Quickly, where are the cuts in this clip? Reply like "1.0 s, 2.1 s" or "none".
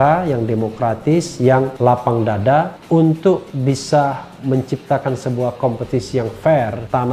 none

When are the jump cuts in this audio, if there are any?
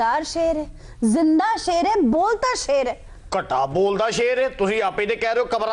none

